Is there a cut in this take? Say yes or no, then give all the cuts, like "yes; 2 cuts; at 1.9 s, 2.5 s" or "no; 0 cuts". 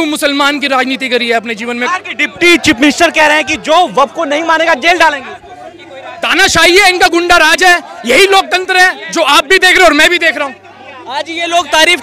no; 0 cuts